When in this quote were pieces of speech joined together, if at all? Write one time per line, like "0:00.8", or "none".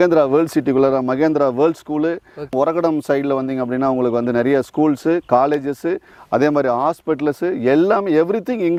none